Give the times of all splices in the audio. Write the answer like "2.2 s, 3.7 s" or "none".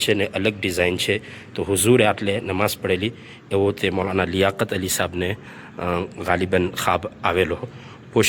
none